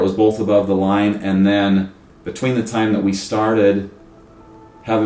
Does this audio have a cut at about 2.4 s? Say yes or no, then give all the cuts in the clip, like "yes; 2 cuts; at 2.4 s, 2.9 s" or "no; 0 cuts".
no; 0 cuts